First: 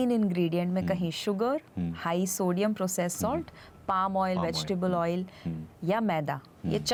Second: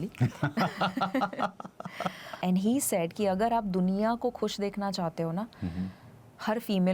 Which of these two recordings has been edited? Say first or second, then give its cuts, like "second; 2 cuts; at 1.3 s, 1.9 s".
second; 1 cut; at 2.3 s